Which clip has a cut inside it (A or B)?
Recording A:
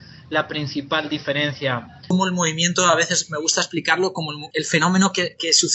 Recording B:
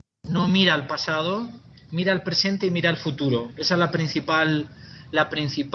A